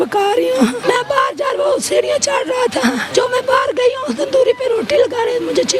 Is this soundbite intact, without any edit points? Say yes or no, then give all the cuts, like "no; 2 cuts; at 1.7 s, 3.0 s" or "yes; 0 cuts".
no; 2 cuts; at 0.8 s, 3.0 s